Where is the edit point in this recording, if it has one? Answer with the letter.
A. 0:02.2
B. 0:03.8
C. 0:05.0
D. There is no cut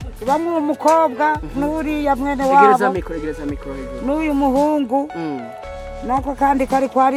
D